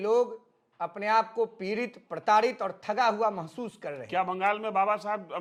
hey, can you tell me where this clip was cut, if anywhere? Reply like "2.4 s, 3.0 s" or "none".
none